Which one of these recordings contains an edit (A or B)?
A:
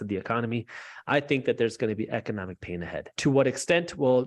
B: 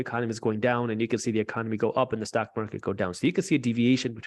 A